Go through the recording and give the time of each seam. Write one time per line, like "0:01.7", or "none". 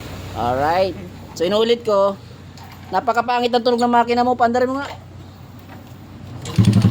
none